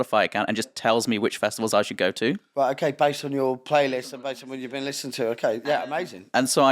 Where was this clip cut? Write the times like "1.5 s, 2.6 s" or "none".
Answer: 2.4 s